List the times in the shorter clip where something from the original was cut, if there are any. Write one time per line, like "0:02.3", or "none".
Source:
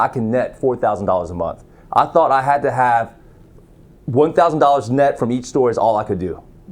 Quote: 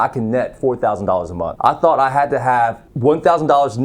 0:01.5
0:02.9